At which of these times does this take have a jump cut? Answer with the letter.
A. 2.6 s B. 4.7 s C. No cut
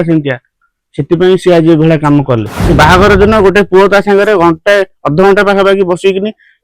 A